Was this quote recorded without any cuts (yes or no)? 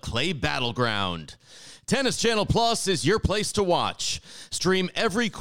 yes